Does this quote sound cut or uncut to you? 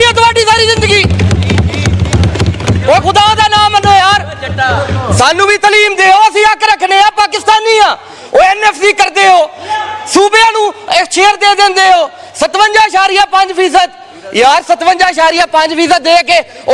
uncut